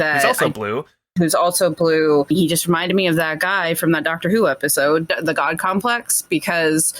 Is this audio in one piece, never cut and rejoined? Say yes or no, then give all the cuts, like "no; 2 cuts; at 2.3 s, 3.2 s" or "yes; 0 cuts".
no; 2 cuts; at 2.3 s, 5.1 s